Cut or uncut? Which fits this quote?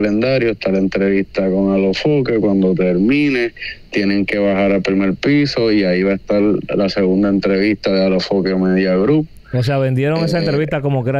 uncut